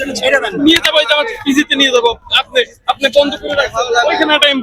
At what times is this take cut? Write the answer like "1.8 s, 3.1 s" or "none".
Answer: none